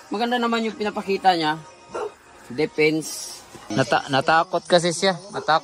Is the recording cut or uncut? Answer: cut